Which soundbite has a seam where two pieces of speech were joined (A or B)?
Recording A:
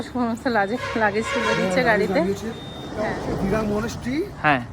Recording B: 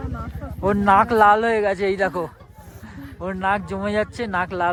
A